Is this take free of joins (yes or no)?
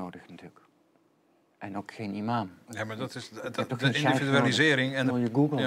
yes